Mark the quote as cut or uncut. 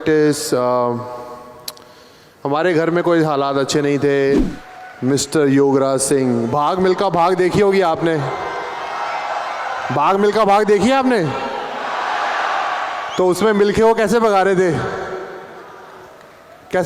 cut